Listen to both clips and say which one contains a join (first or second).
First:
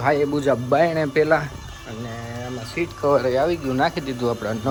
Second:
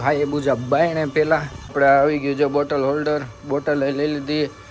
second